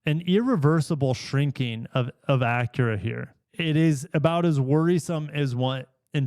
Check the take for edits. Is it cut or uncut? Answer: cut